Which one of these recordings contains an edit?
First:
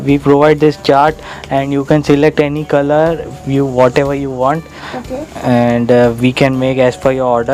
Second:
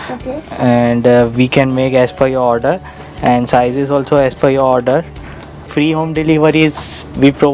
second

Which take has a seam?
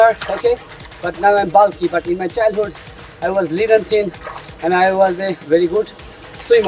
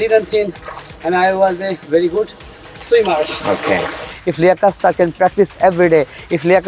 second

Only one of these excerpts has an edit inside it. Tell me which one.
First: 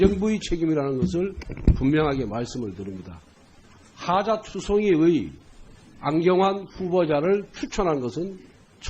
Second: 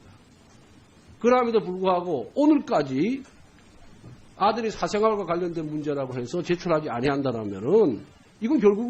first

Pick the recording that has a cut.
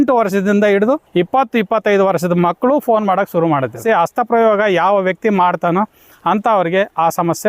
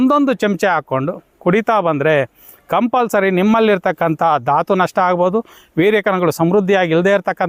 first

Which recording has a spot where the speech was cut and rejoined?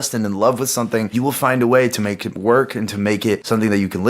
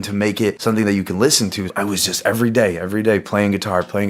first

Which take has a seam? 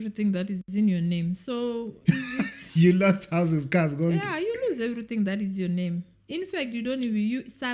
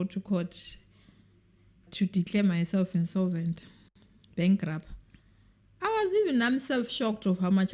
second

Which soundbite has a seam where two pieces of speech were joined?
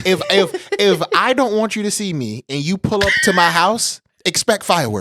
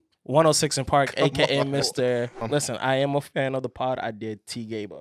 second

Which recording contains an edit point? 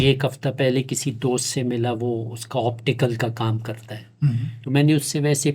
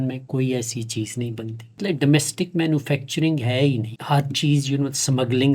second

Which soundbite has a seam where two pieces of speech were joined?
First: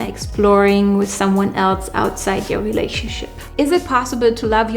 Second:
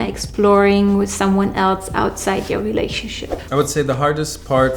first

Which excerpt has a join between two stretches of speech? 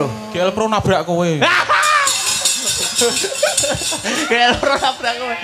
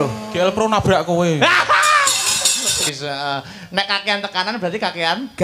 second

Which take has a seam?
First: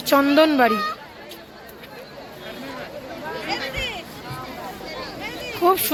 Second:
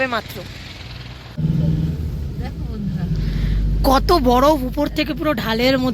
second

